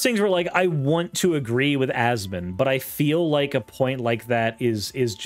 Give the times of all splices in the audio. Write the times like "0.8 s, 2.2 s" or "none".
none

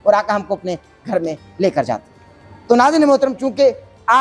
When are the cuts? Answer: none

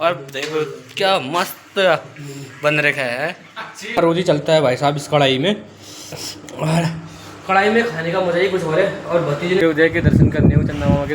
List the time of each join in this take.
4.0 s, 9.6 s

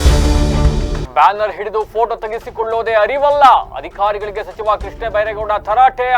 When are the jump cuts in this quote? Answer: 1.0 s

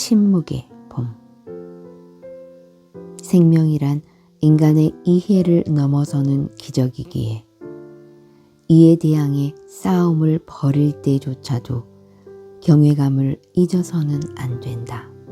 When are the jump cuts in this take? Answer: 7.4 s, 8.5 s

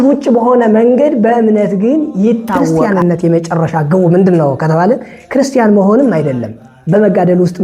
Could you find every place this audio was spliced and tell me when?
2.8 s

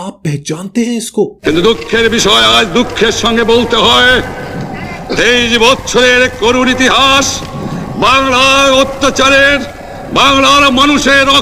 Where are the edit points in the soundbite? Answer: 1.4 s

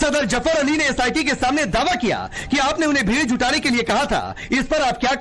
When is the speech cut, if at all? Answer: 2.0 s

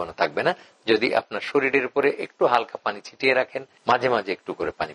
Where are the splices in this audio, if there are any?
3.7 s

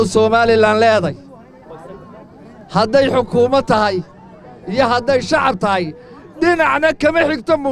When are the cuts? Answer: none

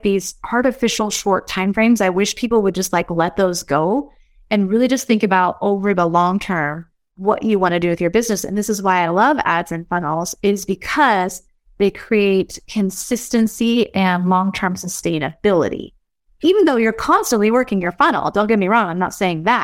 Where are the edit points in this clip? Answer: none

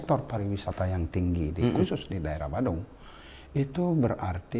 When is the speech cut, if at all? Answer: none

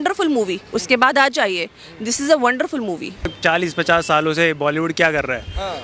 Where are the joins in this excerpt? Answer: 3.3 s

